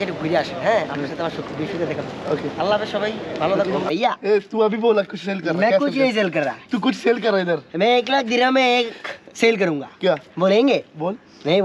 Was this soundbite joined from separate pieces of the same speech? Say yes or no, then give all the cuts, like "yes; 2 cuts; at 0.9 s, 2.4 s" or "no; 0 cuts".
yes; 1 cut; at 3.8 s